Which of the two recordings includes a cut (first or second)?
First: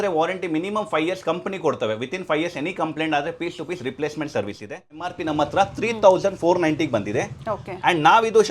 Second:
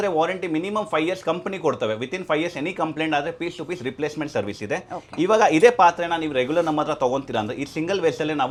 first